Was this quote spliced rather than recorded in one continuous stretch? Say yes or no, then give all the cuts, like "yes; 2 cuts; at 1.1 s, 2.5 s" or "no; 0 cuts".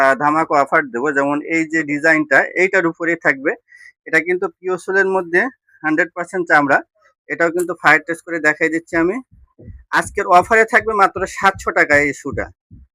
no; 0 cuts